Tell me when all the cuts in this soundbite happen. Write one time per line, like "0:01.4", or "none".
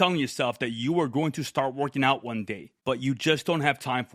0:02.6